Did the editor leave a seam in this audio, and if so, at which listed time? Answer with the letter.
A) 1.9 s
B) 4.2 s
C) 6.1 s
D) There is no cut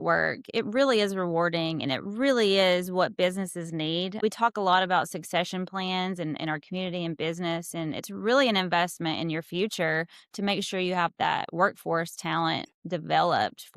B